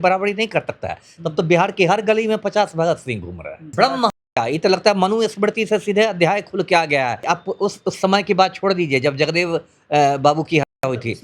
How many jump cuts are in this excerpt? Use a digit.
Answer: 2